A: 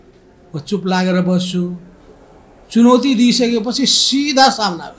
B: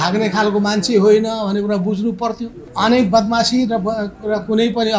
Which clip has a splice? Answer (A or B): B